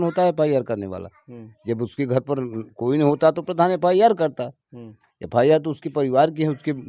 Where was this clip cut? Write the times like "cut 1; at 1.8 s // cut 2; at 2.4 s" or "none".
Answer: none